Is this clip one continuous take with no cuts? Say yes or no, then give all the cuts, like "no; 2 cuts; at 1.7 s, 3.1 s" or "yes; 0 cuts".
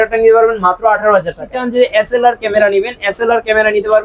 no; 1 cut; at 1.6 s